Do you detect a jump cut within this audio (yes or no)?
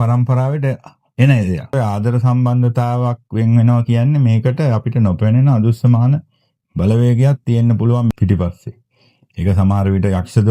yes